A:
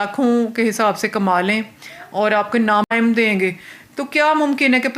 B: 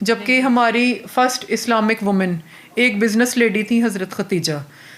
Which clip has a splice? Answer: A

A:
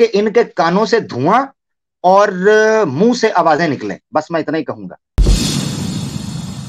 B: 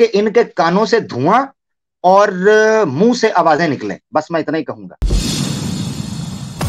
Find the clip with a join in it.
B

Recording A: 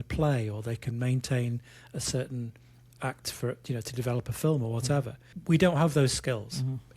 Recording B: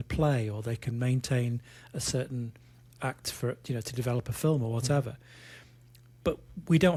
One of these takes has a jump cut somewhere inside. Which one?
A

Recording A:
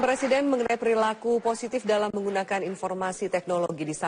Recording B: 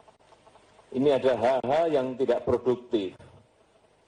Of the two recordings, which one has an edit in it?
A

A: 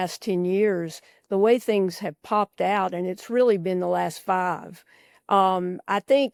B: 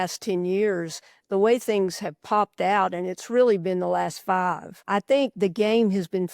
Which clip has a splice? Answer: B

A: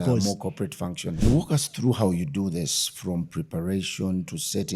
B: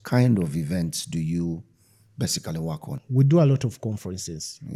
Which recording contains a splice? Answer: A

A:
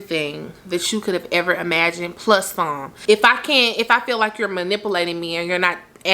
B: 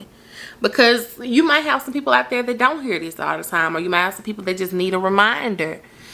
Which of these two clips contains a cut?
A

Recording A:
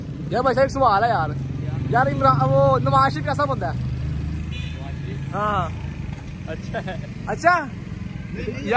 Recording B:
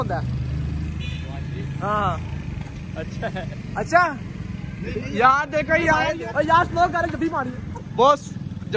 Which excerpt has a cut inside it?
B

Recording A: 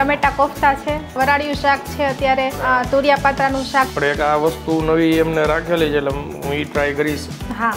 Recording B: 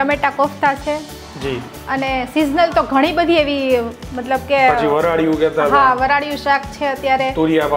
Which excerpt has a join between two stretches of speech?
A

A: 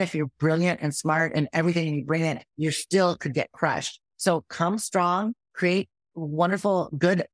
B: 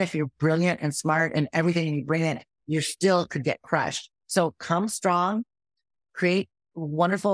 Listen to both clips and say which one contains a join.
A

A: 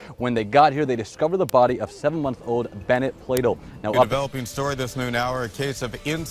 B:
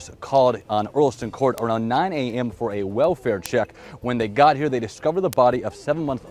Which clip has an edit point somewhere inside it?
A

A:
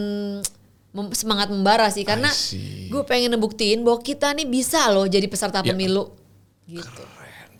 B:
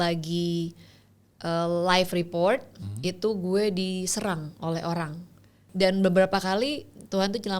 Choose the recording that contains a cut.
B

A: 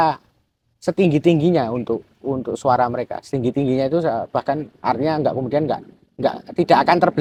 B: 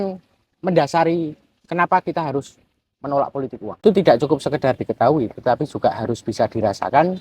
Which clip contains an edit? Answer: B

